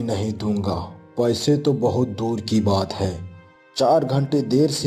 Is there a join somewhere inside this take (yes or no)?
no